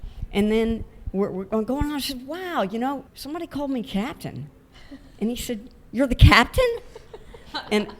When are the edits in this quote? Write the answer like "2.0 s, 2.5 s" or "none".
3.1 s

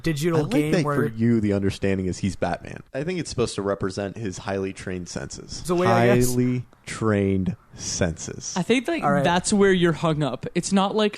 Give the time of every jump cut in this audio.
2.8 s, 5.7 s

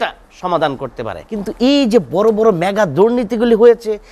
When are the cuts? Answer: 1.2 s

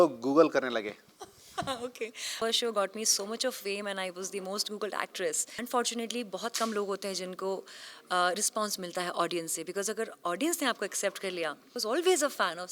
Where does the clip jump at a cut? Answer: 2.4 s, 5.5 s, 11.7 s

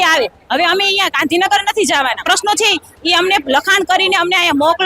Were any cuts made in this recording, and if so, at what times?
2.2 s

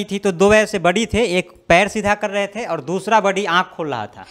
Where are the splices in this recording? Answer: none

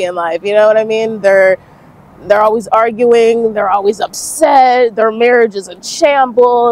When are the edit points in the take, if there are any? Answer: none

